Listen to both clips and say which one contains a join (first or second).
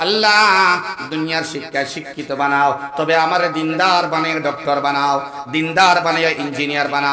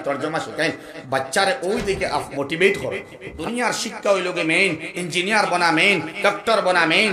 second